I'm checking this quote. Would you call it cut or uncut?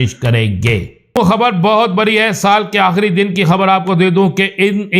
cut